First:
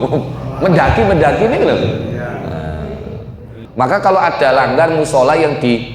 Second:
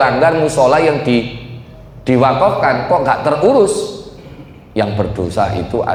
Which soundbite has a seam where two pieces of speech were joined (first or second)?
first